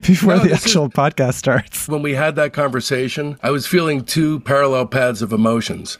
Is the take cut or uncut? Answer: cut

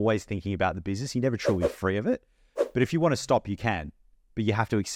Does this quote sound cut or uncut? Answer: uncut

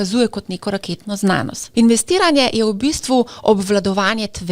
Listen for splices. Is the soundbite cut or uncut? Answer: cut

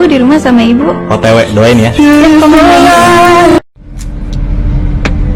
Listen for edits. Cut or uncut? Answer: cut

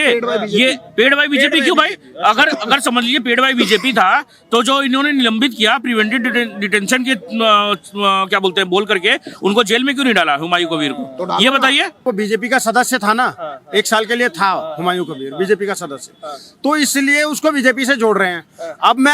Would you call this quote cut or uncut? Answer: cut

